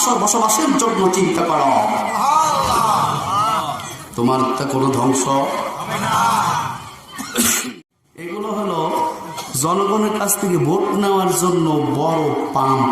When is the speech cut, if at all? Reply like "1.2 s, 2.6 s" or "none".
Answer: 7.6 s